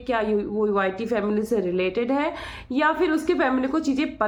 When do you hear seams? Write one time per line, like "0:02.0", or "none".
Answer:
none